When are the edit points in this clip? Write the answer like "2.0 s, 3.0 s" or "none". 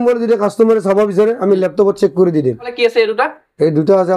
none